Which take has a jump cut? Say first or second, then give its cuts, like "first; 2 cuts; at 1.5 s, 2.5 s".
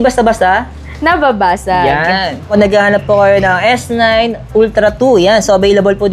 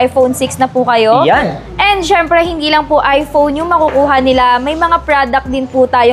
first; 1 cut; at 2.5 s